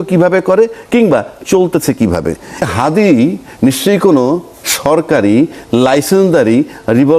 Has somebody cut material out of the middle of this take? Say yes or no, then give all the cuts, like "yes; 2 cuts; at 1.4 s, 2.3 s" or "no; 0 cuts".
yes; 1 cut; at 2.7 s